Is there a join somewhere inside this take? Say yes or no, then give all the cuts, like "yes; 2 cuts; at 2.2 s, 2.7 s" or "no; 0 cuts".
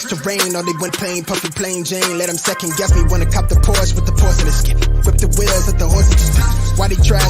yes; 1 cut; at 0.9 s